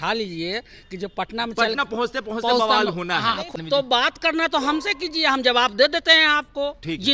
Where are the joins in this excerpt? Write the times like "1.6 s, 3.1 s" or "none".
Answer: 3.6 s